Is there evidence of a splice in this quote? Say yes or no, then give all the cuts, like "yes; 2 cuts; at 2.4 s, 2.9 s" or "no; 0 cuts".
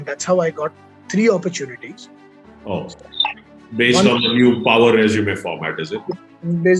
no; 0 cuts